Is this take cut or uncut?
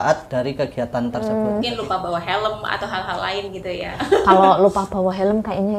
cut